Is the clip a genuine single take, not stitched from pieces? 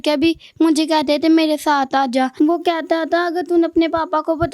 no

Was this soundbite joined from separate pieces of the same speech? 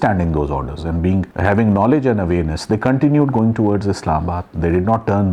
no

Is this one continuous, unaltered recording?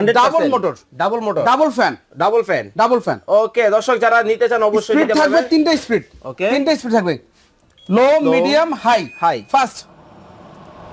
yes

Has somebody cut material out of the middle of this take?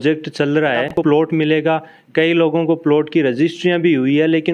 yes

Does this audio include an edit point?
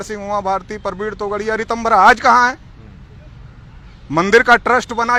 no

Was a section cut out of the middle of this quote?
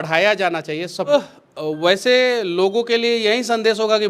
yes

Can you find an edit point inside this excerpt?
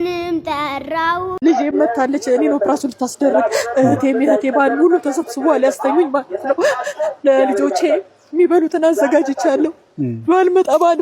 yes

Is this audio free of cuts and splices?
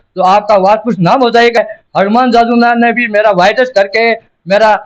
no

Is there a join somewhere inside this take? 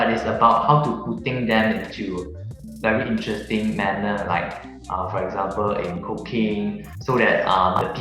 yes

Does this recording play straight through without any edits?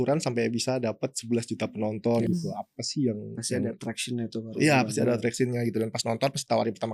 yes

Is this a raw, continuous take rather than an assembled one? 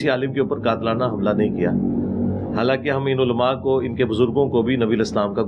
yes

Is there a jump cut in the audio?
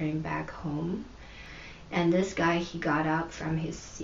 yes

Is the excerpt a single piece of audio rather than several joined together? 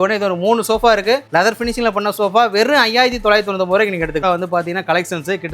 no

